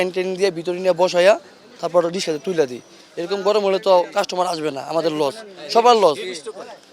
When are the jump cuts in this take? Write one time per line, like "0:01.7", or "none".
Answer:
none